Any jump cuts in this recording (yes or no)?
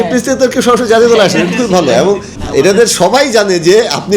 yes